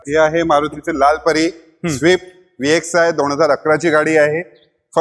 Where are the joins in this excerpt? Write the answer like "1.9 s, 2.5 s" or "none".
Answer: none